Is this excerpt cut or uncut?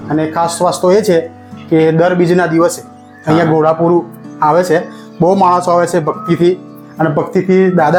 uncut